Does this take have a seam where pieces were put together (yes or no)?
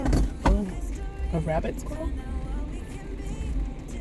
no